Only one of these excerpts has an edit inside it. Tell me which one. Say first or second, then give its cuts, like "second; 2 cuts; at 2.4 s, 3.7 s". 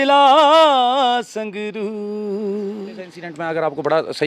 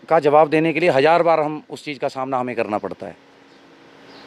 first; 1 cut; at 3.3 s